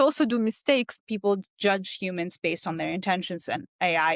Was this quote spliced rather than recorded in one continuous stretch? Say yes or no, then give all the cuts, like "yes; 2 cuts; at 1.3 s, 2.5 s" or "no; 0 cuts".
yes; 1 cut; at 0.9 s